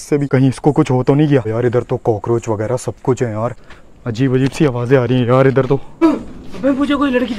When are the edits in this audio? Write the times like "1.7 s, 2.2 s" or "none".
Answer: 1.5 s, 3.7 s, 6.0 s